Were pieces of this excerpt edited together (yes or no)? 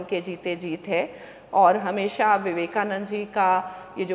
no